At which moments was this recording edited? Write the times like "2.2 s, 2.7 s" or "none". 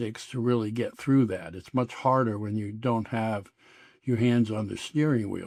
none